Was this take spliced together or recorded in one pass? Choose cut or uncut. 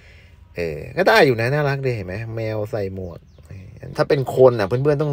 cut